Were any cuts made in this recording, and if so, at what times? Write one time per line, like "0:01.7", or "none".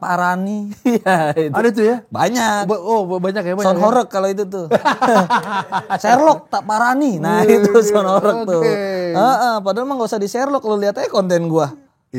none